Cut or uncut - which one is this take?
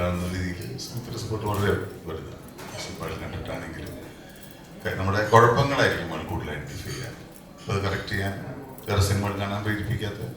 cut